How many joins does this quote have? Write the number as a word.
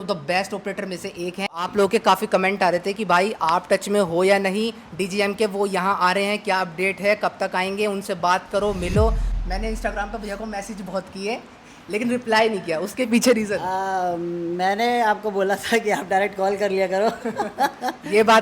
two